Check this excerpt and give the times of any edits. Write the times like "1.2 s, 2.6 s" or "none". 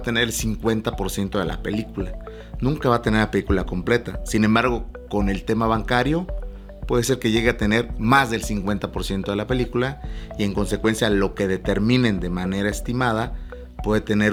none